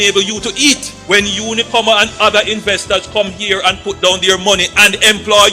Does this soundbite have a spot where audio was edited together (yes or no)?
no